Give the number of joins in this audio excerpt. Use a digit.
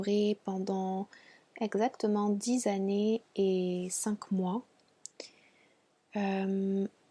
0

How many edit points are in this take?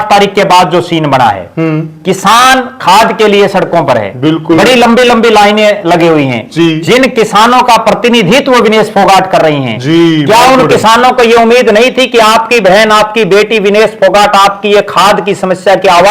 0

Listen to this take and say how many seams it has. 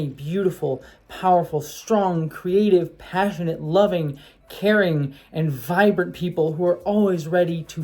0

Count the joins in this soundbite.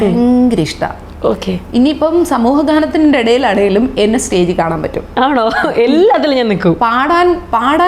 0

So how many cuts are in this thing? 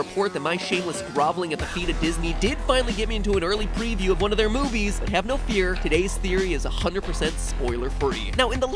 0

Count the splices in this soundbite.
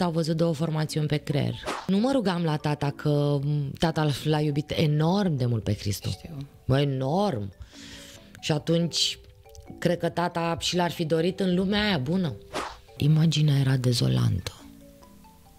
2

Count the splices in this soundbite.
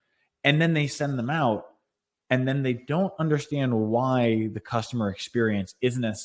0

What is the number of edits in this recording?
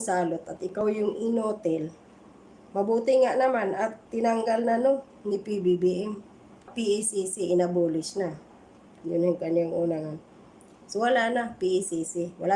1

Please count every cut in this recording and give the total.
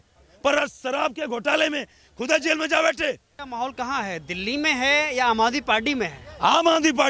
1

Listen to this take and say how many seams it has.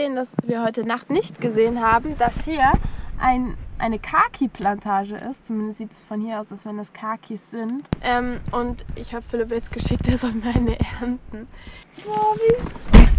2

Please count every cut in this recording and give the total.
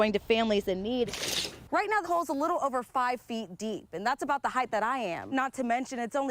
1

